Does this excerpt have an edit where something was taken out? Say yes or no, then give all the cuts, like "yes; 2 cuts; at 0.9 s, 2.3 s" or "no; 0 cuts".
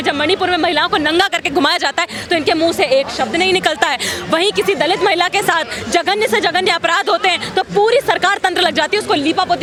no; 0 cuts